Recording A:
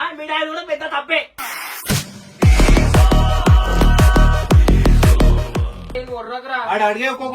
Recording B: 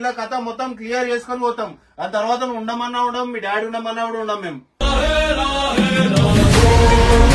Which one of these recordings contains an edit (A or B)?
A